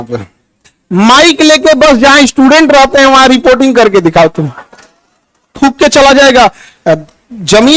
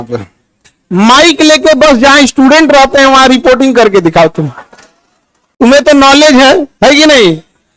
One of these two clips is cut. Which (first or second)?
first